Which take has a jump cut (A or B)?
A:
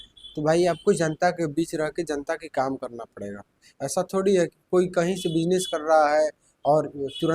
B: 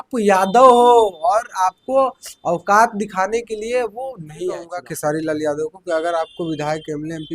B